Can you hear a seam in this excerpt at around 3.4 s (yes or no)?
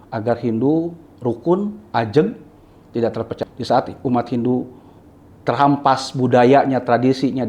yes